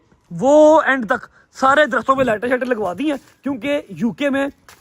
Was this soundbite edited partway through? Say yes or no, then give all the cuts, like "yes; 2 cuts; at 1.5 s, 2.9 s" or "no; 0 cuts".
no; 0 cuts